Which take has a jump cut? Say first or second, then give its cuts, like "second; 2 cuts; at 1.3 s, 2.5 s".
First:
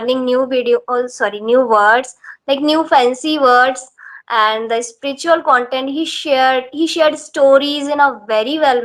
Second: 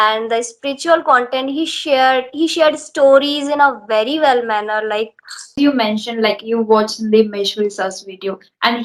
second; 1 cut; at 5.5 s